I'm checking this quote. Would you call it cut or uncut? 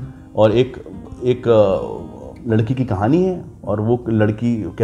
uncut